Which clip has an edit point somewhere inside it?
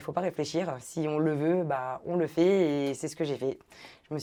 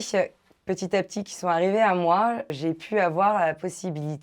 second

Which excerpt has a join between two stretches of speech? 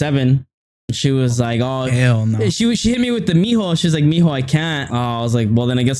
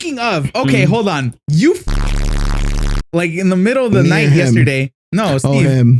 first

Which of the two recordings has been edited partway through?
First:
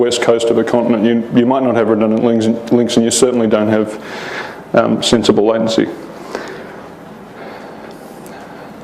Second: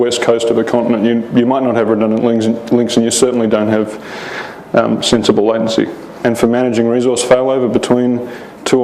first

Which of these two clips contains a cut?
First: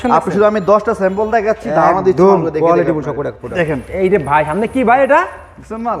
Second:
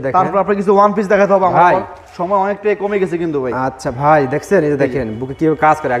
first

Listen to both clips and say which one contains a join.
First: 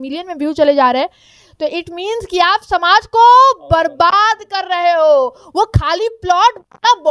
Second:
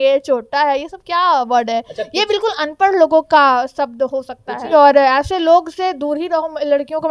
second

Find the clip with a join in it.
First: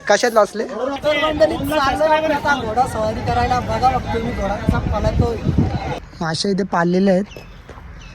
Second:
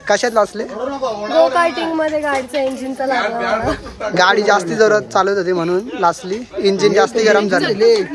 first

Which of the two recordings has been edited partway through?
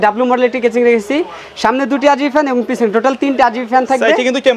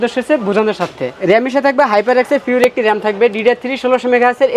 second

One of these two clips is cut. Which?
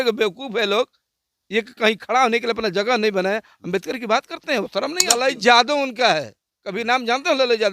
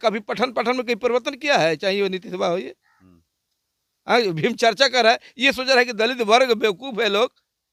first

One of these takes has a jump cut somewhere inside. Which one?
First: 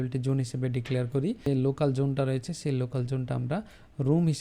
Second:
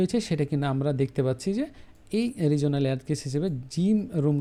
first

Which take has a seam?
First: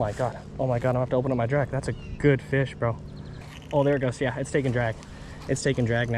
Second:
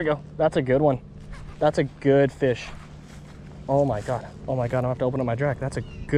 first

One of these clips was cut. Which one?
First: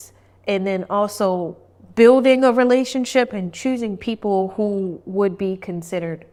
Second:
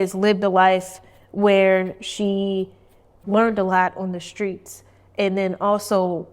second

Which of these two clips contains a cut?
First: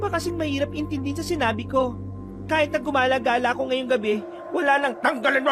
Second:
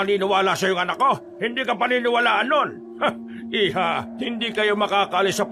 second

